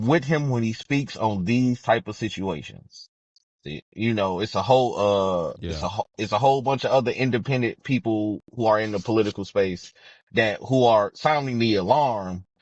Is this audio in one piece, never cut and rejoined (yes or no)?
yes